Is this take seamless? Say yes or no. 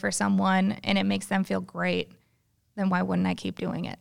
yes